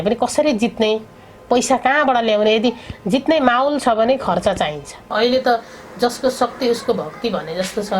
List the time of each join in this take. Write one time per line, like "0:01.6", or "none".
0:05.1